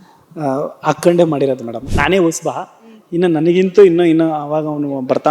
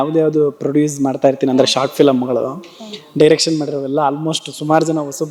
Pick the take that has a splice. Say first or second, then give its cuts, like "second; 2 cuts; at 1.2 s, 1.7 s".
first; 1 cut; at 1.8 s